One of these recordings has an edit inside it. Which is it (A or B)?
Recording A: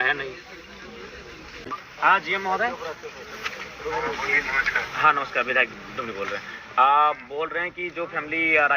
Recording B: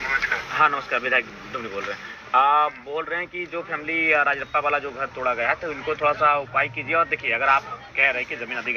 A